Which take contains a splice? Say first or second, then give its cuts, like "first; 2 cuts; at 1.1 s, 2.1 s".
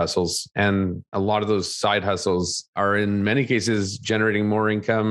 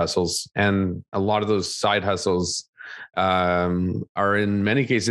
first; 1 cut; at 2.6 s